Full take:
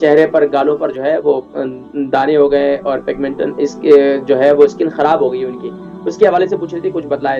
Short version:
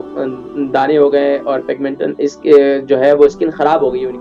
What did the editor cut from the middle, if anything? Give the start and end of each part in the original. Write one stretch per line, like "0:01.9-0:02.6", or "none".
none